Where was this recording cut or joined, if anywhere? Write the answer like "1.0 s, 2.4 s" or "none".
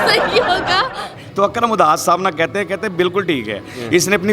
1.2 s